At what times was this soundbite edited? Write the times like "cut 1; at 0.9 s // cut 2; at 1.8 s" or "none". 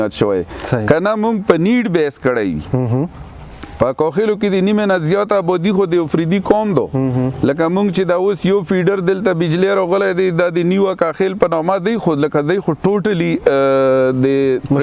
none